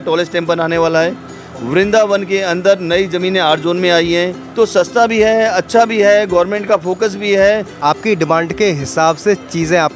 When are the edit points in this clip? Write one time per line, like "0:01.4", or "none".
0:04.4
0:07.8

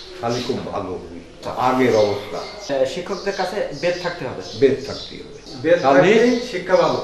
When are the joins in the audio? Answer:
0:01.4
0:02.7
0:05.4

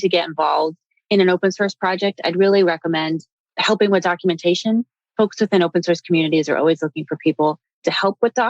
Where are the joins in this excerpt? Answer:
none

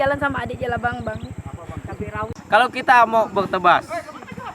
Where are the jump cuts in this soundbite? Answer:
0:02.3

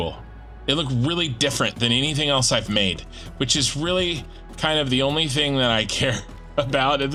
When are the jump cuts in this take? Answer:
none

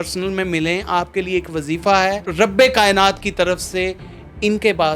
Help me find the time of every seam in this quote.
0:02.3

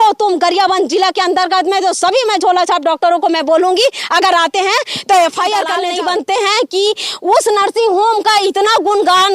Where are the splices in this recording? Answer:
0:05.8

